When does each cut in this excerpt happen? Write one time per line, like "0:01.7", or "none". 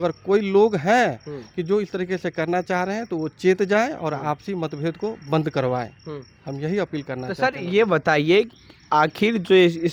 none